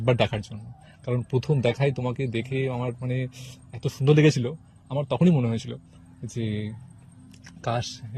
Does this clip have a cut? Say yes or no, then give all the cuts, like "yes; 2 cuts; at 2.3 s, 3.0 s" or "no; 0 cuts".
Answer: no; 0 cuts